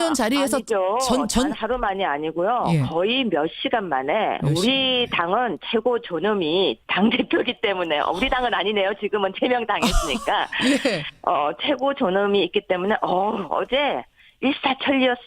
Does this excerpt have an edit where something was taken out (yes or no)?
yes